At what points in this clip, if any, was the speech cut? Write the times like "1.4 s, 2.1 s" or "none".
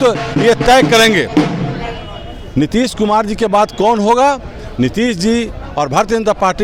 none